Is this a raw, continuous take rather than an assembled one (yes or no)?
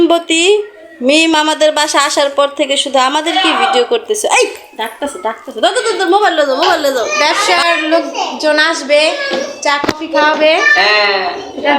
no